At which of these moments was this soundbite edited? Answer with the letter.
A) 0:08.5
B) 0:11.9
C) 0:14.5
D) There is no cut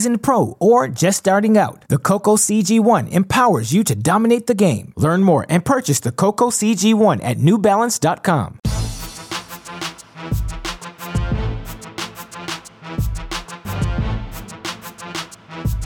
A